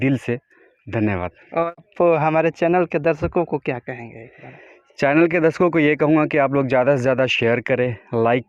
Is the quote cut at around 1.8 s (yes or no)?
yes